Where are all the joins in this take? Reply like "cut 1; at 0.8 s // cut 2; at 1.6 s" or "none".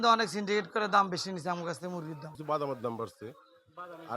cut 1; at 2.3 s